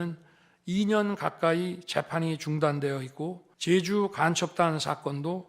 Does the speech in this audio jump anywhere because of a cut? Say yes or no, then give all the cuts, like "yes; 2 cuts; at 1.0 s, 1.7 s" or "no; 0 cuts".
yes; 1 cut; at 3.5 s